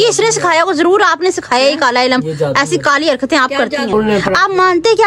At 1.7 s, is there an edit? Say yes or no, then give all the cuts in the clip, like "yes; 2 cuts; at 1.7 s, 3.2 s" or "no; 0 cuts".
no; 1 cut; at 3.9 s